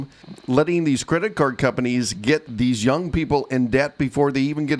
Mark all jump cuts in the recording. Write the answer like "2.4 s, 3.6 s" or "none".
none